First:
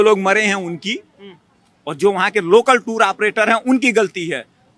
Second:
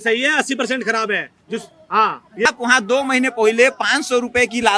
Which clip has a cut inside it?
second; 1 cut; at 2.5 s

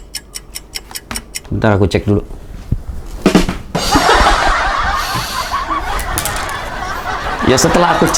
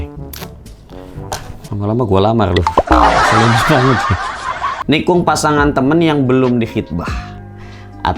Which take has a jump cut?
second; 1 cut; at 4.7 s

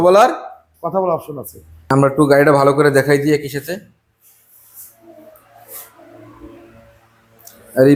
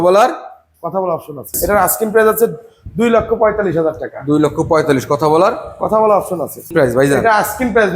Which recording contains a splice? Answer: second; 2 cuts; at 1.5 s, 6.7 s

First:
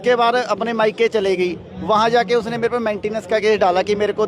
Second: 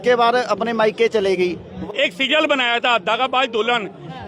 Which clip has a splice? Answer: second; 1 cut; at 1.8 s

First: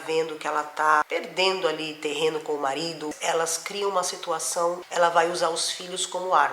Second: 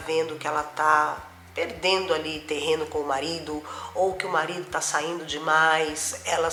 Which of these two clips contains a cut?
first; 3 cuts; at 1.1 s, 3.1 s, 4.8 s

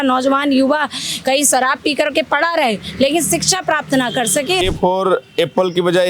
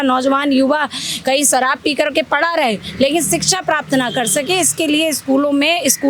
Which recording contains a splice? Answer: first; 1 cut; at 4.6 s

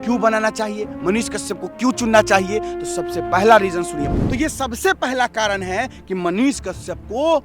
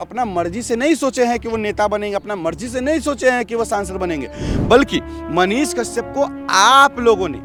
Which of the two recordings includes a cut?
first; 1 cut; at 4.0 s

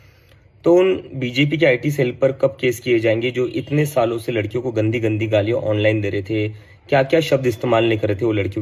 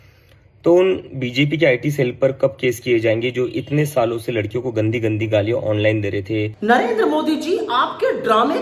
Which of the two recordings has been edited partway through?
second; 1 cut; at 6.5 s

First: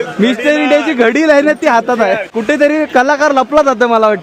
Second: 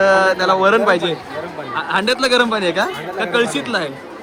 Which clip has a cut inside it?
first; 1 cut; at 2.3 s

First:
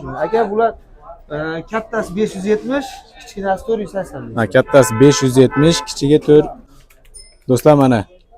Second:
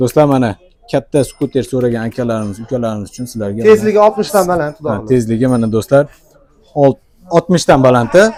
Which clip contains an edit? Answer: first; 1 cut; at 6.6 s

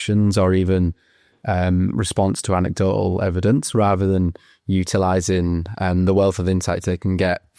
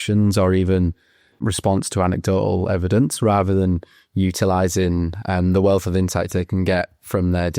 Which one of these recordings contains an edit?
second; 1 cut; at 1.4 s

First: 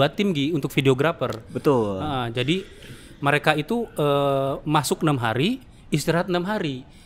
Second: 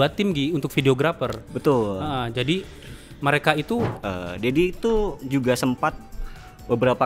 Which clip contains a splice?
second; 1 cut; at 3.9 s

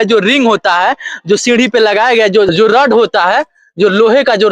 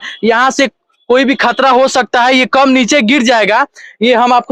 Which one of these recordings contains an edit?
first; 1 cut; at 2.5 s

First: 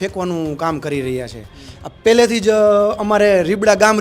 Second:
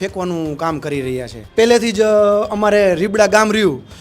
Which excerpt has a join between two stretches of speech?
second; 1 cut; at 1.4 s

